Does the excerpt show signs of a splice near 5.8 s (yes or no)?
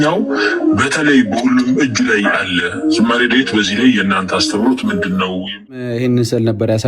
yes